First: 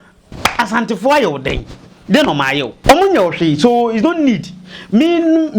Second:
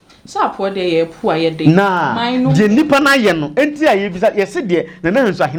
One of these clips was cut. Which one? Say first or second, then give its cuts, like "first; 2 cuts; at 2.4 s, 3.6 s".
first; 1 cut; at 2.8 s